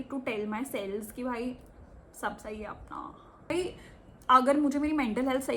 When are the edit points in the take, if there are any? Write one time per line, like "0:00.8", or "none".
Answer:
0:03.5